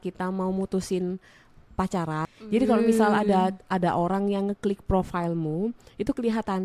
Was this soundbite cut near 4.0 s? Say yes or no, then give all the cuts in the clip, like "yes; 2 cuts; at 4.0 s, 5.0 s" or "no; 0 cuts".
no; 1 cut; at 2.2 s